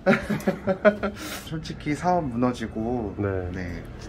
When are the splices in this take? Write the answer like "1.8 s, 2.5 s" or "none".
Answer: 1.4 s